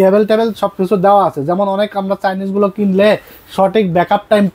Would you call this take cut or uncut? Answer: uncut